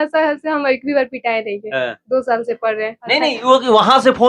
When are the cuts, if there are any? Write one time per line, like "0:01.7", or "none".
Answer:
0:03.0

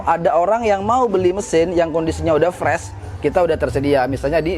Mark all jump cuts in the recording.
none

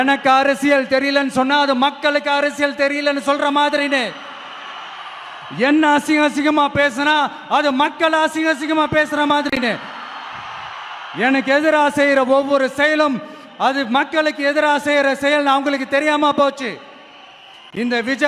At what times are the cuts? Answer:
none

